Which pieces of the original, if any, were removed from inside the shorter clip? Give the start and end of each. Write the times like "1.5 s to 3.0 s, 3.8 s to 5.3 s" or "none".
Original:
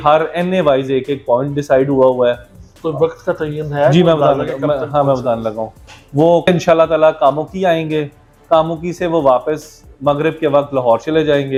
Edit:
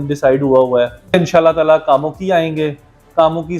2.6 s to 6.4 s